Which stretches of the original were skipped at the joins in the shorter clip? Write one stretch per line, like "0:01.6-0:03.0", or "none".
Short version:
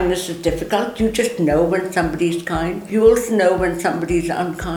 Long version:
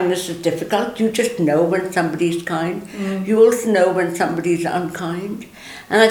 0:02.9-0:03.2